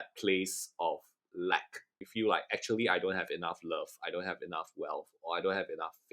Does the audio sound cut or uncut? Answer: uncut